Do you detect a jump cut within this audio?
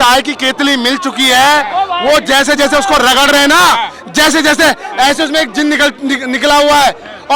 no; 0 cuts

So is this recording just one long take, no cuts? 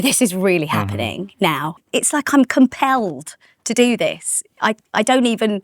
no; 1 cut; at 1.7 s

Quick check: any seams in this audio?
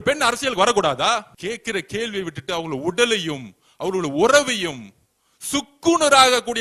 yes; 1 cut; at 1.3 s

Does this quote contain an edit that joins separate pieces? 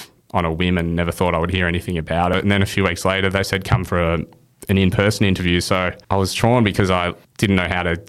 yes; 3 cuts; at 2.4 s, 6.0 s, 7.2 s

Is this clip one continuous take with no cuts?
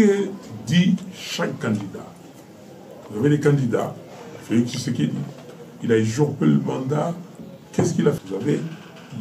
yes; 0 cuts

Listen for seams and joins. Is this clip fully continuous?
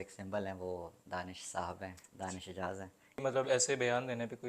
no; 1 cut; at 3.2 s

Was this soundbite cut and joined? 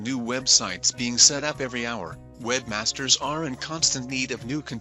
no; 0 cuts

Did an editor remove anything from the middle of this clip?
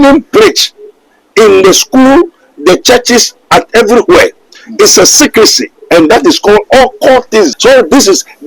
yes; 1 cut; at 7.5 s

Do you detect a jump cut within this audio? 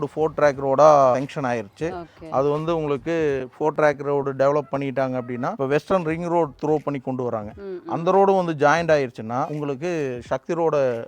yes; 3 cuts; at 1.1 s, 5.5 s, 9.5 s

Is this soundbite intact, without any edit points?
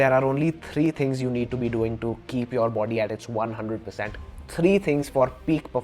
yes; 0 cuts

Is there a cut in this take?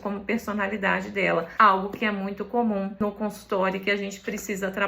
yes; 2 cuts; at 1.5 s, 3.0 s

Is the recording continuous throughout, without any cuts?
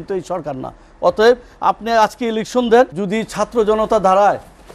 no; 1 cut; at 3.0 s

